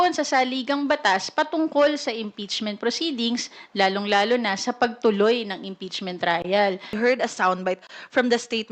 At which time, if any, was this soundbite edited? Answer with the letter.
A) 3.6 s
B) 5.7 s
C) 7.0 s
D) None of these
C